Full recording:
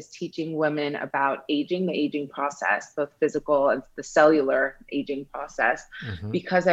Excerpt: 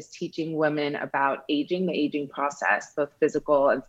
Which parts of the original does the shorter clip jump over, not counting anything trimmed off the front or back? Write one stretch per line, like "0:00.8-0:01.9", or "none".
none